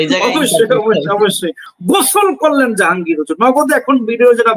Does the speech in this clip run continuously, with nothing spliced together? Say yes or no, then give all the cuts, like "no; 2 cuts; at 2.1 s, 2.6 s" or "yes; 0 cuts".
no; 1 cut; at 1.7 s